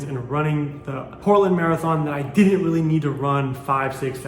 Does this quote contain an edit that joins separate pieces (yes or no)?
yes